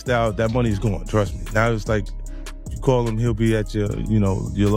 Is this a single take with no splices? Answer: yes; 0 cuts

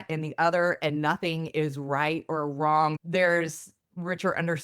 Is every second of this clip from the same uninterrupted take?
no; 1 cut; at 3.0 s

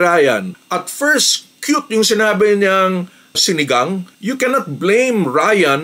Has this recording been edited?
yes; 1 cut; at 4.1 s

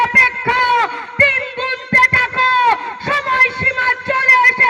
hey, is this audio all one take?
yes; 0 cuts

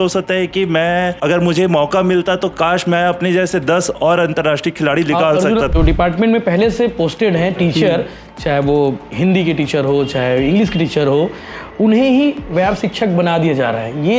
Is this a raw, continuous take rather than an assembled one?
no; 2 cuts; at 1.2 s, 5.7 s

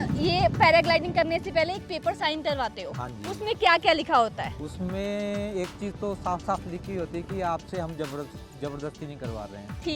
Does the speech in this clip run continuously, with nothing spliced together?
yes; 0 cuts

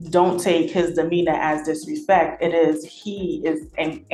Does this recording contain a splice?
no; 0 cuts

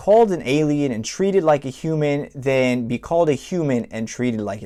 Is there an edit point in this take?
no; 0 cuts

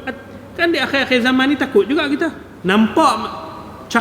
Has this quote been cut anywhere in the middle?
yes; 1 cut; at 2.5 s

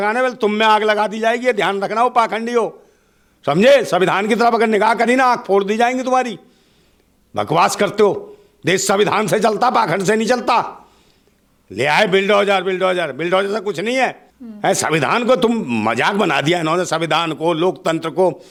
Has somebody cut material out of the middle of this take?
no; 0 cuts

